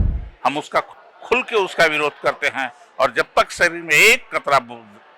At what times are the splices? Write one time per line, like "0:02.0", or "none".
0:00.9